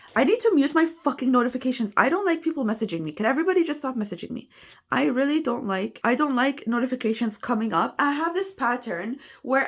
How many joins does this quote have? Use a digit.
0